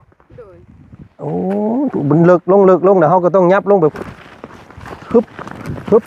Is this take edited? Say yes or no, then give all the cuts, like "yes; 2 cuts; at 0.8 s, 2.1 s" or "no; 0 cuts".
yes; 1 cut; at 3.9 s